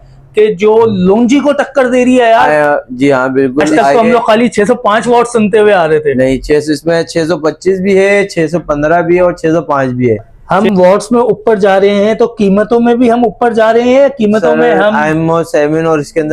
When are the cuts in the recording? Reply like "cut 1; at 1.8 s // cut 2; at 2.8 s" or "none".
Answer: cut 1; at 3.8 s // cut 2; at 10.3 s